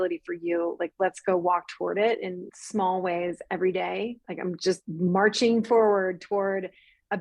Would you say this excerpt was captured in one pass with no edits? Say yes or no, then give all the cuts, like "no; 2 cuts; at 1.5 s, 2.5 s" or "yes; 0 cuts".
yes; 0 cuts